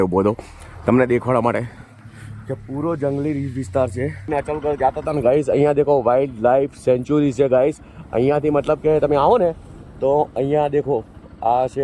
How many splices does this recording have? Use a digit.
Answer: 1